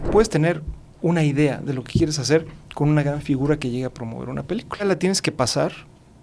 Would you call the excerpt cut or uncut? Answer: cut